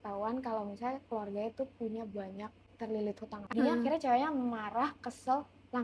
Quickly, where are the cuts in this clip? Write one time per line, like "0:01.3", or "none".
0:03.5